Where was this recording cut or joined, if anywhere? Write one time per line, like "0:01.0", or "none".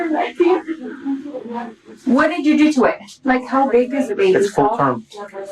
0:03.2